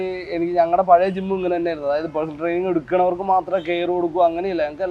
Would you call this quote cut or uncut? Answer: uncut